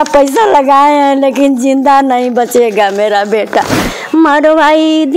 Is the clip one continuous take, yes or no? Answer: no